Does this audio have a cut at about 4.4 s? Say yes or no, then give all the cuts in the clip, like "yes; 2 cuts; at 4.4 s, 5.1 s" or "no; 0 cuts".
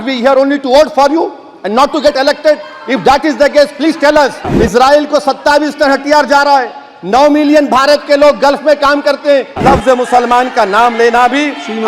yes; 2 cuts; at 4.4 s, 9.6 s